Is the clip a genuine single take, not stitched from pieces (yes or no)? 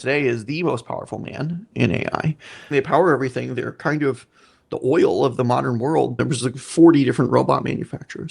no